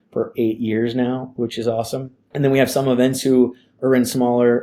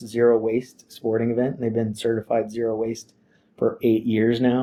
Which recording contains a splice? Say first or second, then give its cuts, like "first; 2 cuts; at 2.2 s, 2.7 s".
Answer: first; 1 cut; at 2.2 s